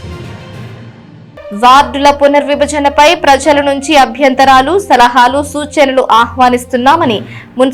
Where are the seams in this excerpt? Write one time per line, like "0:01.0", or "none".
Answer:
0:01.2